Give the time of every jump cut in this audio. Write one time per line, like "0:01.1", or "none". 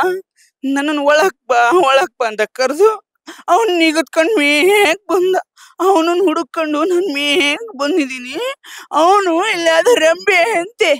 none